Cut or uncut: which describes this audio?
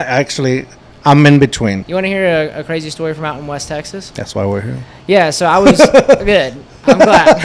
cut